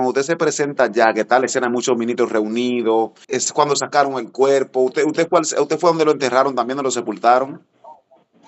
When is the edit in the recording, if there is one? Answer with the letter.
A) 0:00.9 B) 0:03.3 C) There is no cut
B